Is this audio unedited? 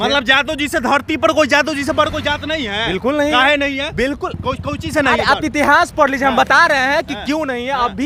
yes; 0 cuts

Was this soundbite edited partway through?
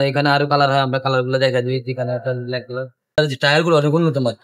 yes; 1 cut; at 3.2 s

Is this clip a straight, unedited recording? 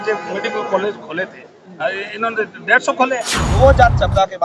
no; 1 cut; at 3.5 s

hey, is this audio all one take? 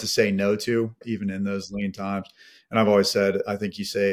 no; 1 cut; at 1.0 s

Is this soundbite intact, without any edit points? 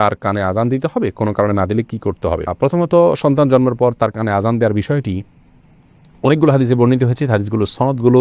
yes; 0 cuts

